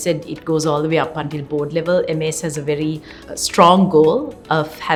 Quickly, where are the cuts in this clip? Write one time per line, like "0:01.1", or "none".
none